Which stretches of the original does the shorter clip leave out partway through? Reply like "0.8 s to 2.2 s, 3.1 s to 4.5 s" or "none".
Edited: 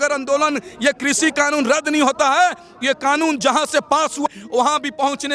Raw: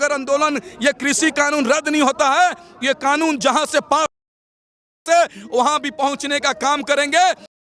4.4 s to 5.4 s